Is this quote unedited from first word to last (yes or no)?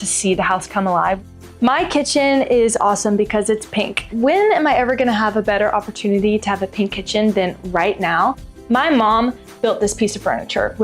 no